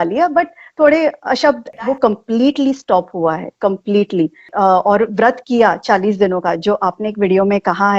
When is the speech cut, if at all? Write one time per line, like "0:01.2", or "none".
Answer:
0:01.7
0:04.5